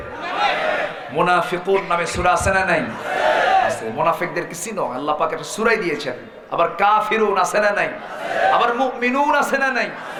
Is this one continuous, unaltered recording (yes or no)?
yes